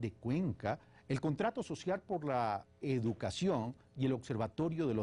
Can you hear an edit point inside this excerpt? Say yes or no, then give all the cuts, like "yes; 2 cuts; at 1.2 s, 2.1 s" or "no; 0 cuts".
no; 0 cuts